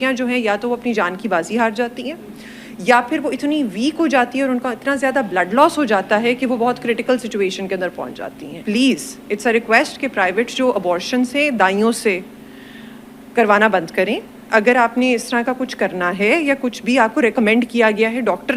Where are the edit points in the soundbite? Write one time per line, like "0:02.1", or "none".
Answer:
0:08.6